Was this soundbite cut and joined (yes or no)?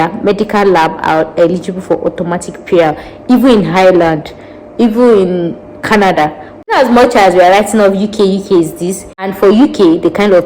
yes